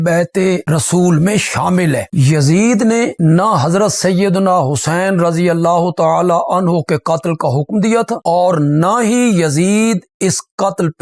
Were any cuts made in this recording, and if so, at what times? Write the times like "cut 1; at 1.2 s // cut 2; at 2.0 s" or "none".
cut 1; at 2.1 s